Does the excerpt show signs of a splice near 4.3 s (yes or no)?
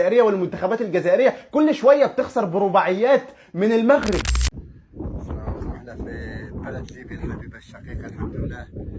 yes